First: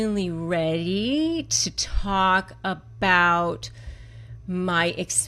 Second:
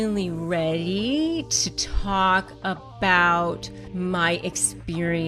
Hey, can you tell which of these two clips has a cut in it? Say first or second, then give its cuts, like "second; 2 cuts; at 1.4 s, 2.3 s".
second; 1 cut; at 3.8 s